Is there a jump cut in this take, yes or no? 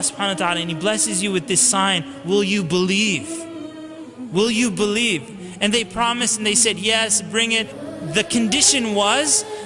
yes